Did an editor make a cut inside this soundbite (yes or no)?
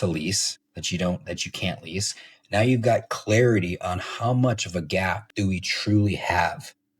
yes